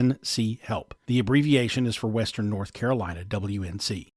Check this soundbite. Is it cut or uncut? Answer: cut